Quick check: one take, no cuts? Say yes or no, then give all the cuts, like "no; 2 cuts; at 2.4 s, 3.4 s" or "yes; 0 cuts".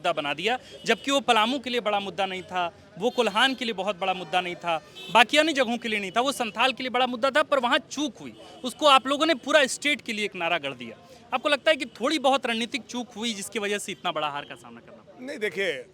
yes; 0 cuts